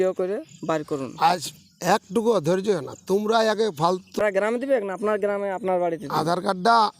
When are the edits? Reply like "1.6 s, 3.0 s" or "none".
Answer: 4.2 s